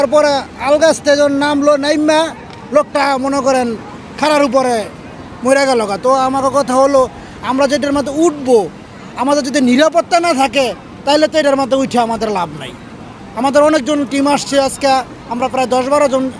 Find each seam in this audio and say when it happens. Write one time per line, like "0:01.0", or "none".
none